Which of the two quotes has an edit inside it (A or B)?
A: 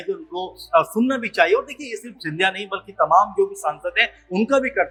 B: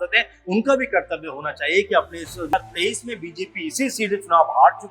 B